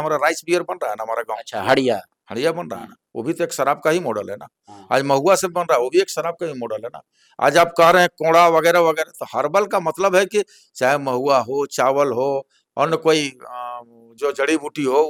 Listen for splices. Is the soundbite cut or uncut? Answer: uncut